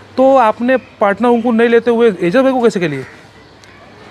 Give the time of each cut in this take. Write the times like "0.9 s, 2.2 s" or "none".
none